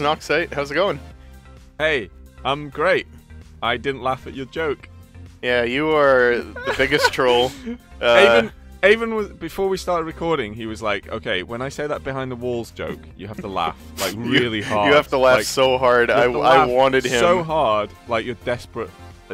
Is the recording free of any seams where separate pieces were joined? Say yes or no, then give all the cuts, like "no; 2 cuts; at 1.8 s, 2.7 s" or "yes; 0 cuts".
no; 1 cut; at 1.0 s